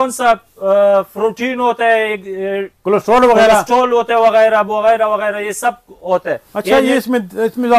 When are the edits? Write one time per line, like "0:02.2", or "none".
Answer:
none

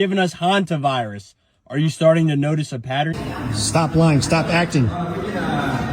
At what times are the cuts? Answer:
0:03.1

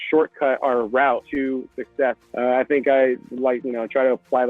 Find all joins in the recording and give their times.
0:01.3
0:02.2

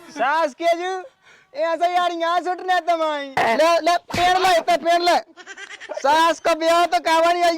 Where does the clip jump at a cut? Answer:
0:03.4

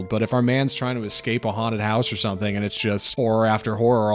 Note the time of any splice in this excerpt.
0:03.1

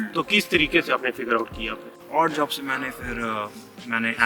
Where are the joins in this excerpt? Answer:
0:02.0

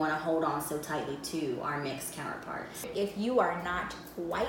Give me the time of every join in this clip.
0:02.9

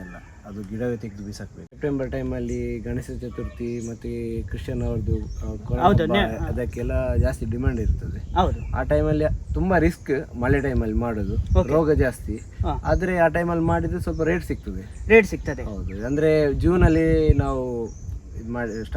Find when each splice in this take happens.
0:01.7

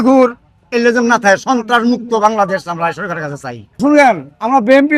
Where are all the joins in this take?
0:03.8

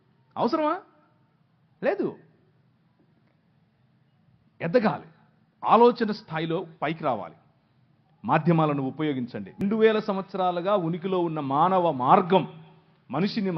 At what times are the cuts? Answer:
0:09.5

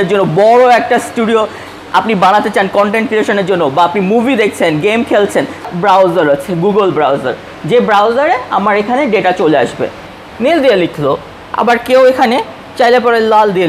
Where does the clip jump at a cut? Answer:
0:05.7
0:10.2

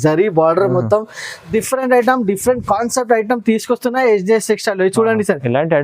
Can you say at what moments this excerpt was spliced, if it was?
0:01.4

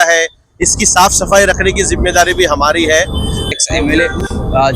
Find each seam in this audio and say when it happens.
0:03.5

